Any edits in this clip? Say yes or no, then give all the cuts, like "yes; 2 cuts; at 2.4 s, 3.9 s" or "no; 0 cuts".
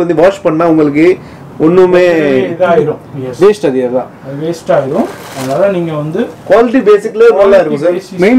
no; 0 cuts